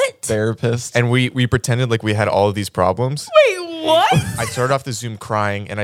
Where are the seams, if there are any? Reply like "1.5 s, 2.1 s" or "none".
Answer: 4.4 s